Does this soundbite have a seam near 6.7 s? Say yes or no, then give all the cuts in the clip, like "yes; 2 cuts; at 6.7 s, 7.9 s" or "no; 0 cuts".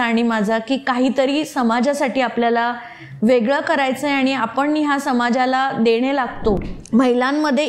yes; 1 cut; at 6.7 s